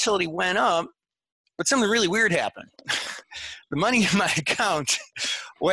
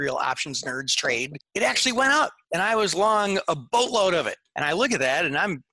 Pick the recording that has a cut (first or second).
second